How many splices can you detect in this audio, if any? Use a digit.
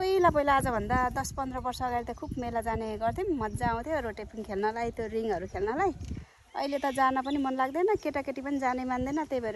0